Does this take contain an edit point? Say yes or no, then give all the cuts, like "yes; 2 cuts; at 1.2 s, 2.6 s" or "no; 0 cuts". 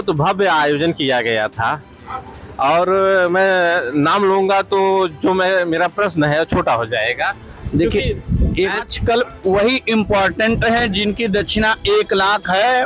yes; 1 cut; at 8.9 s